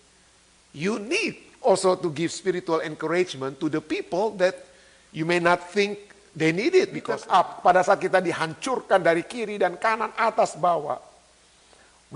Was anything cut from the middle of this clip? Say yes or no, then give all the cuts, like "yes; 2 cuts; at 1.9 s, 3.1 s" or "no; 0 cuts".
yes; 1 cut; at 7.2 s